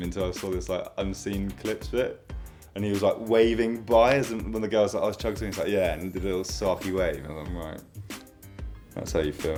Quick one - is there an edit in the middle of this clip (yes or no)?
no